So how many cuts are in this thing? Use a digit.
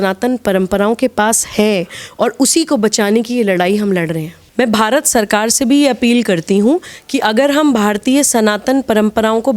1